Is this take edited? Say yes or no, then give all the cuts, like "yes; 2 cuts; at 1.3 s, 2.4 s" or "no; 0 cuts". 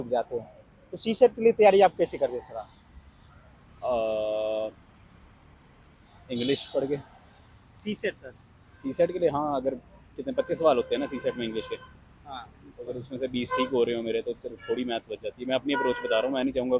no; 0 cuts